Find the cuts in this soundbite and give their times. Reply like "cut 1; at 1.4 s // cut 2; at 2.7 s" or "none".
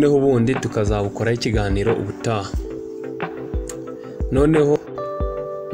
cut 1; at 2.5 s // cut 2; at 4.2 s

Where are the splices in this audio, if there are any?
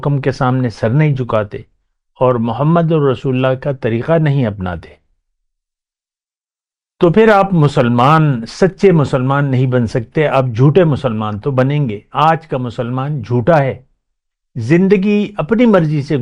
none

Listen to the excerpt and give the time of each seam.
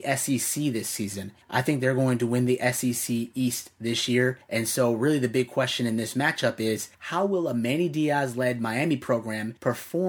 none

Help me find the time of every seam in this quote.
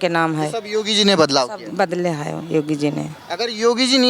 none

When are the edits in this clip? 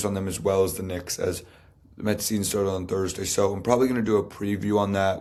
none

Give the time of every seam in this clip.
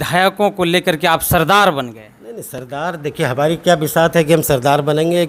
none

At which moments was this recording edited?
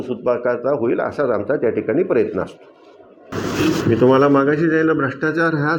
cut 1; at 3.3 s

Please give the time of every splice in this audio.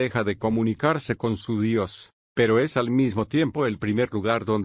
cut 1; at 1.0 s

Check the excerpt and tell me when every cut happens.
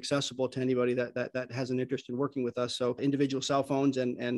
none

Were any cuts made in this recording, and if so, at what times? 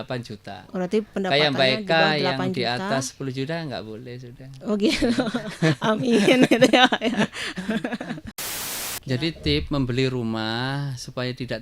cut 1; at 8.4 s

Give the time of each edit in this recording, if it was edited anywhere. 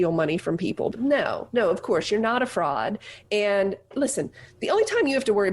cut 1; at 0.9 s // cut 2; at 3.9 s

